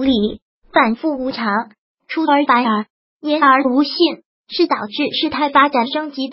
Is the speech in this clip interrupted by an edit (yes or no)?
no